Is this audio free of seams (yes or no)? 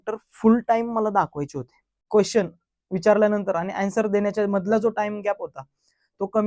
no